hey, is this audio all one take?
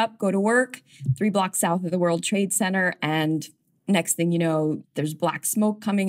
no; 2 cuts; at 3.7 s, 4.8 s

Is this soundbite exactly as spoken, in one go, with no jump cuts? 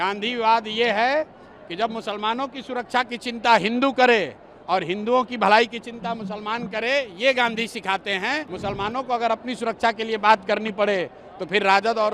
no; 1 cut; at 8.5 s

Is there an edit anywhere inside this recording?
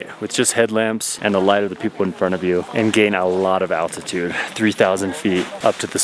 no; 0 cuts

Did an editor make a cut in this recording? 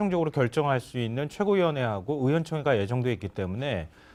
no; 0 cuts

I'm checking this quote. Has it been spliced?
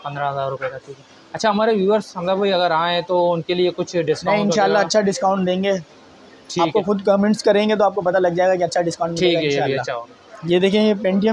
yes; 1 cut; at 10.1 s

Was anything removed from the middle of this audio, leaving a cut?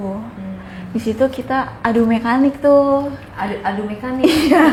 no; 0 cuts

